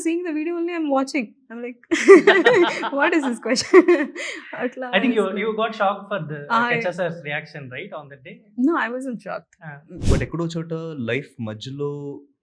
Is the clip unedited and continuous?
no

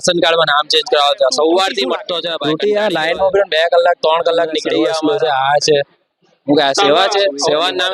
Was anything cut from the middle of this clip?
yes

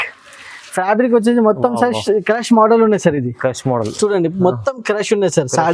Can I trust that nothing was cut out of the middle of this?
yes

